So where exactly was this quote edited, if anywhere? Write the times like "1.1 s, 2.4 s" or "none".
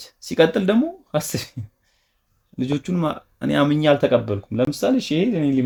none